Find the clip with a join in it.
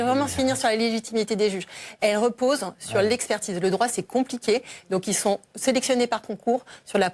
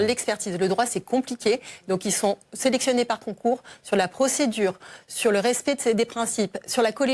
first; 1 cut; at 1.6 s

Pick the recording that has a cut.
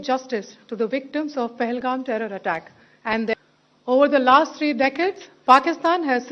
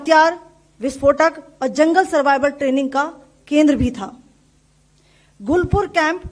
first; 1 cut; at 3.3 s

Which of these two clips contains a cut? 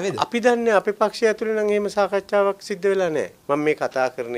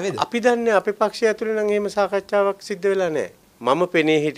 first; 1 cut; at 3.3 s

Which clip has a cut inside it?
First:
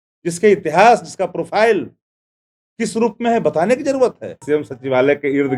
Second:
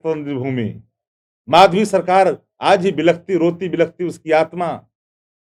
first; 1 cut; at 4.4 s

